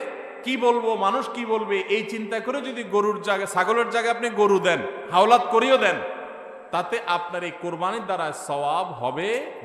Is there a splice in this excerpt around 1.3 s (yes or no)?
no